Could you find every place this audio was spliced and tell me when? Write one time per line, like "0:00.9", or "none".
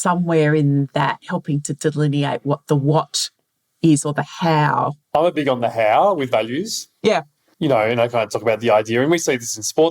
0:05.0